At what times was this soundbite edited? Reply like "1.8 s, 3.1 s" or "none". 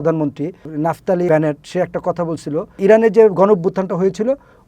1.0 s, 2.8 s